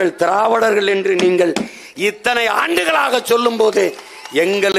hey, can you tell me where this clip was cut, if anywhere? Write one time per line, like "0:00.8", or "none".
none